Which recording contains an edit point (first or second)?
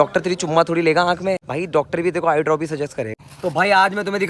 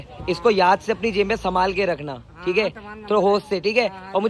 first